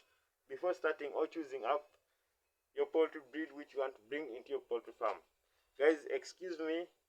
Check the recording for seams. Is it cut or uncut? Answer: uncut